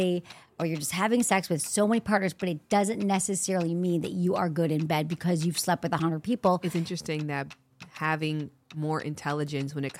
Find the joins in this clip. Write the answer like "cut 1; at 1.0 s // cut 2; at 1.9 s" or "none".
cut 1; at 6.6 s

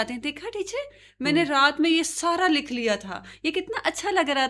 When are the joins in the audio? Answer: none

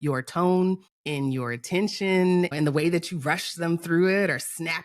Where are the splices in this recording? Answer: cut 1; at 0.9 s // cut 2; at 2.5 s

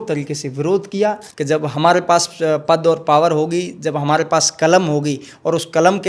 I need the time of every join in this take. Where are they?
cut 1; at 1.3 s

